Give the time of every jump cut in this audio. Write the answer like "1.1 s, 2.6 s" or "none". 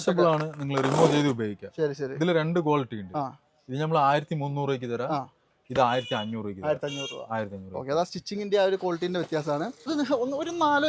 9.9 s